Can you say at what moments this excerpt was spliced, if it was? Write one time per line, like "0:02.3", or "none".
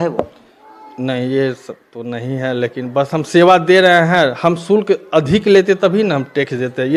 none